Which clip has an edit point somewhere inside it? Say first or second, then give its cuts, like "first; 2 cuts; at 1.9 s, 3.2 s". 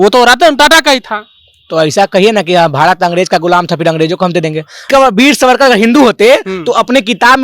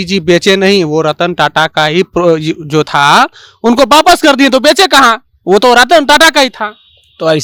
first; 1 cut; at 4.9 s